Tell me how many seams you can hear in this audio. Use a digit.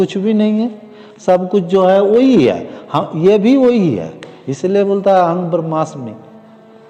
0